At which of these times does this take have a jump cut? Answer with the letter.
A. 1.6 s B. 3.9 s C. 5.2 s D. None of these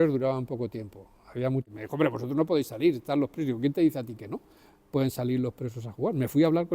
A